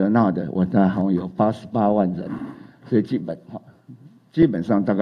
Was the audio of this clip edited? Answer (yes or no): no